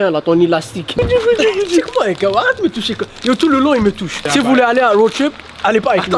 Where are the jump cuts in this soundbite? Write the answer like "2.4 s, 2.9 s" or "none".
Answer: 0.9 s, 4.3 s